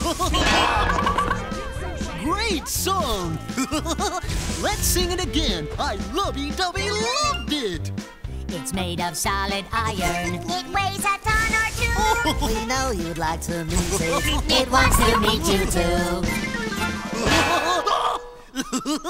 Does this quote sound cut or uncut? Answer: cut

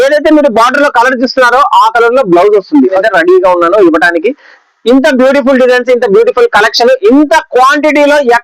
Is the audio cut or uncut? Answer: cut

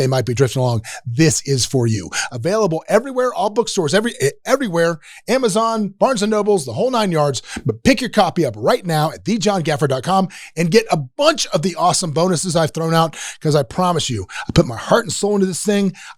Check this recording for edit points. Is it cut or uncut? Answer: uncut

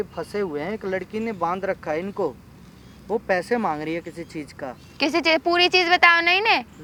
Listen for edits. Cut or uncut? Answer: uncut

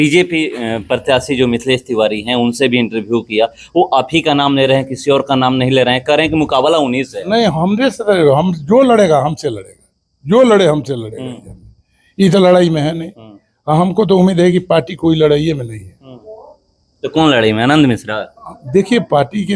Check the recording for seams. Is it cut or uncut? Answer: uncut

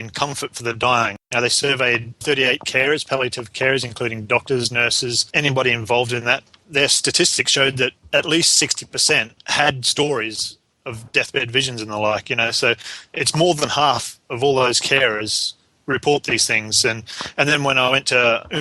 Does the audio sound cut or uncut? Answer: cut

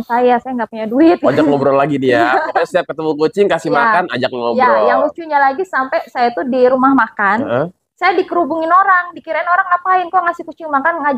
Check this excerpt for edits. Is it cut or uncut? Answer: uncut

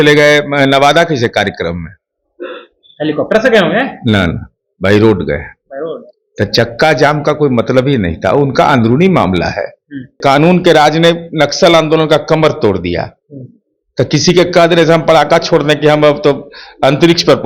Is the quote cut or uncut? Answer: cut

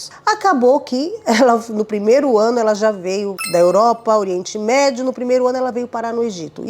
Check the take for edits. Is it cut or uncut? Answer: cut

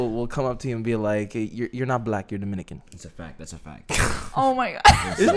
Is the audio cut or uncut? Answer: uncut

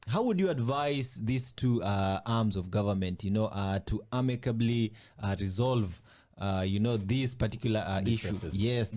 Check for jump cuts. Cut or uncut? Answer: uncut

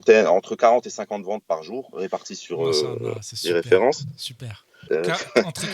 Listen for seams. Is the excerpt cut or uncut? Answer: cut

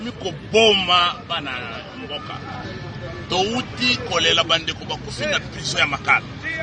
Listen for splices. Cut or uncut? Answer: uncut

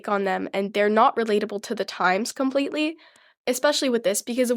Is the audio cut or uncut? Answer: cut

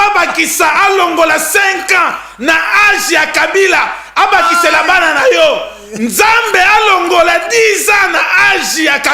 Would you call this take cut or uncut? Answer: uncut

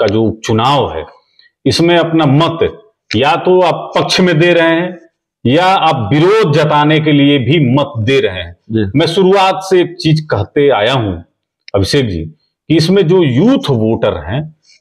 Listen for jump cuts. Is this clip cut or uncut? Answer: uncut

